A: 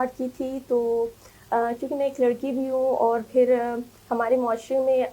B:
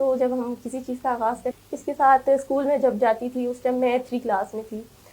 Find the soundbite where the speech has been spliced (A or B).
B